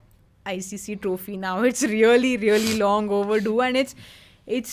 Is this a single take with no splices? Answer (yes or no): yes